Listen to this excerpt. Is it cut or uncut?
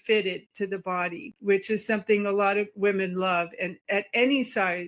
cut